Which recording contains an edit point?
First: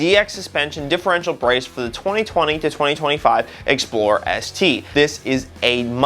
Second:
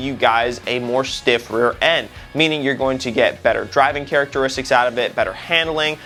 first; 1 cut; at 4.8 s

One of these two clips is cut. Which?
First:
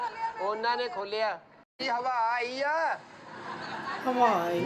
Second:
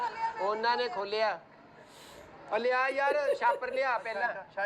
first; 1 cut; at 1.8 s

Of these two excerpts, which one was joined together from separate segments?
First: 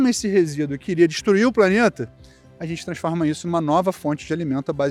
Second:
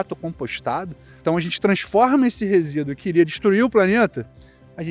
second; 1 cut; at 1.2 s

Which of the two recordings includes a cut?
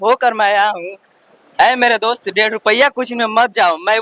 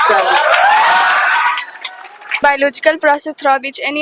second; 1 cut; at 2.4 s

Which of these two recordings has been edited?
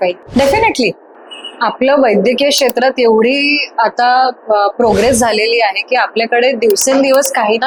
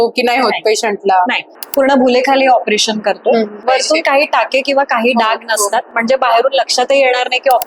second; 2 cuts; at 1.5 s, 3.6 s

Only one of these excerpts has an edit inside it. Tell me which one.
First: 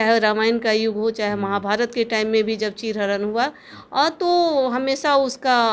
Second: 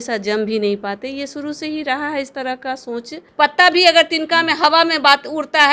second; 1 cut; at 3.2 s

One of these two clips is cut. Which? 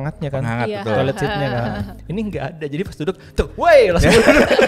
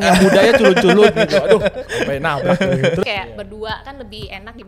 second; 1 cut; at 3.0 s

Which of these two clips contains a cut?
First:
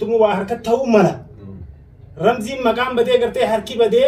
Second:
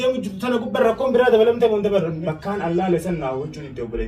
second; 1 cut; at 2.2 s

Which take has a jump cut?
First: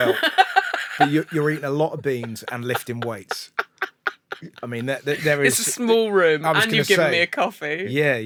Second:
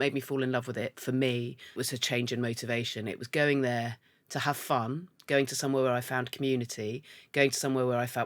second; 1 cut; at 1.8 s

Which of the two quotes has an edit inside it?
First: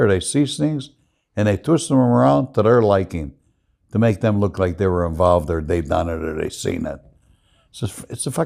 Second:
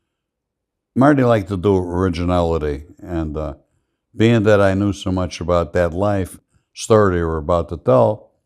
second; 1 cut; at 6.3 s

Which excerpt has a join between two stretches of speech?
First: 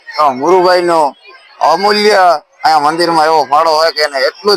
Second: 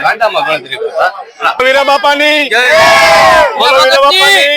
second; 1 cut; at 1.6 s

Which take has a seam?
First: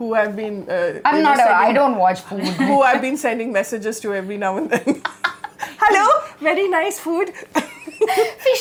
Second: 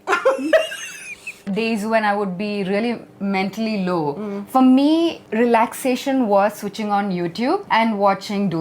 second; 3 cuts; at 1.4 s, 5.2 s, 7.6 s

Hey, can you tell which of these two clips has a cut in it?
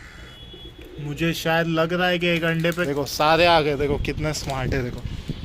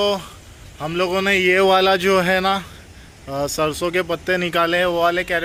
first; 1 cut; at 2.8 s

